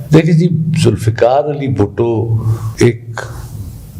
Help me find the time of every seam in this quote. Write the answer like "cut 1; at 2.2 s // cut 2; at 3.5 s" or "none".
cut 1; at 2.6 s